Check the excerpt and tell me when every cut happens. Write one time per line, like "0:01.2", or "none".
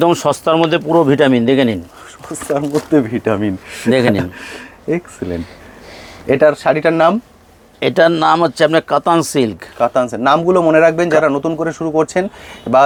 none